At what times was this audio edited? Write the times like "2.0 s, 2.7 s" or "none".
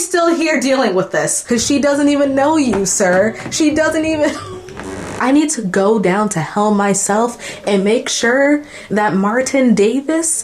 1.4 s, 5.1 s